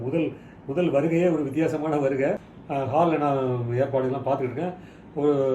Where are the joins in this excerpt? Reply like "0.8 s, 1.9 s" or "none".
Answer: 2.5 s